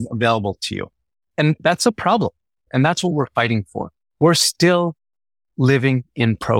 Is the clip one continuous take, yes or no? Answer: yes